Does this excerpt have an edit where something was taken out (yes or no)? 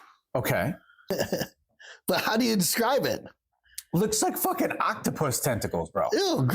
yes